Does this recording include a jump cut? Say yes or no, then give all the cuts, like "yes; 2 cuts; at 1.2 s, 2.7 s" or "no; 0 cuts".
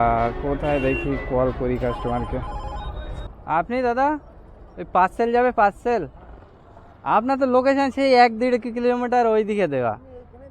yes; 1 cut; at 3.0 s